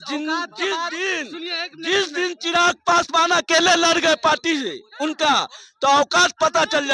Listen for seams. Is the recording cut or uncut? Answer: uncut